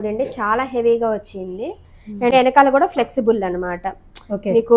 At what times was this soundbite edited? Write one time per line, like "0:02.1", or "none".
0:02.3